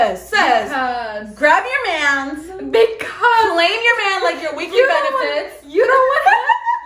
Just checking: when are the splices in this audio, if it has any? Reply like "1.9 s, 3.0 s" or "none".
none